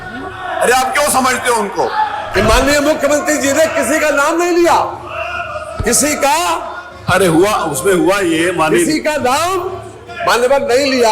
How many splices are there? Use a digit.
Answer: 1